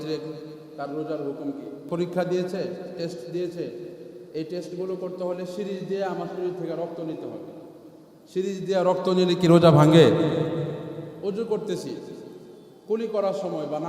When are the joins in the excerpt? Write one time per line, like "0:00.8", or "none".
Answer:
0:01.9
0:10.8